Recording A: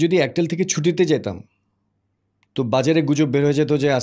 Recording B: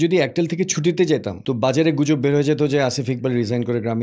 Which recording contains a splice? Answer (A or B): B